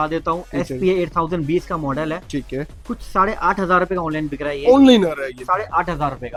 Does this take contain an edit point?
no; 0 cuts

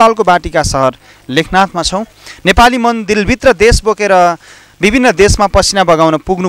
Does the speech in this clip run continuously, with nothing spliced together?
no; 1 cut; at 2.2 s

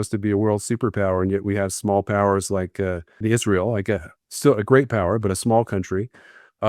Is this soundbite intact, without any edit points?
no; 1 cut; at 3.1 s

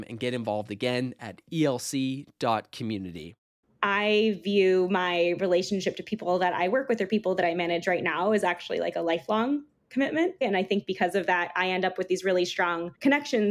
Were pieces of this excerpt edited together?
yes; 2 cuts; at 3.7 s, 10.4 s

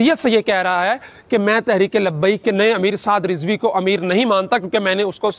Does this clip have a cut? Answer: no; 0 cuts

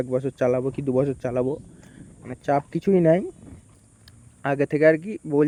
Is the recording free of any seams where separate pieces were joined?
yes; 0 cuts

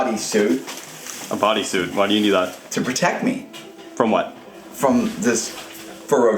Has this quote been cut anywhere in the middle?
yes; 1 cut; at 2.6 s

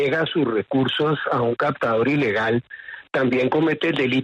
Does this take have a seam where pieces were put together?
no; 0 cuts

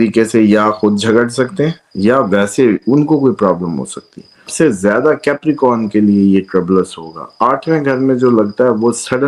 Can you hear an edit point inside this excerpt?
yes; 1 cut; at 4.5 s

